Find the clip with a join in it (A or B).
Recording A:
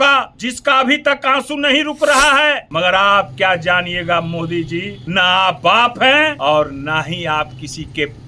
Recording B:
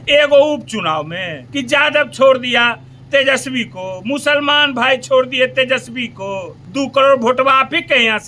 A